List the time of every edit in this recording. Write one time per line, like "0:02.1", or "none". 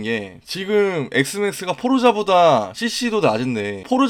none